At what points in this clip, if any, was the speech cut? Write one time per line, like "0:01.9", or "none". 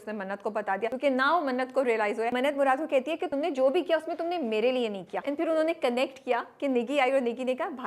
0:00.9
0:02.3
0:03.3
0:05.1